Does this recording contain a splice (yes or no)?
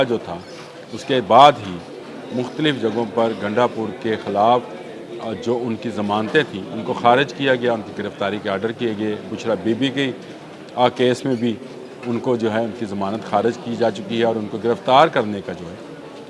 no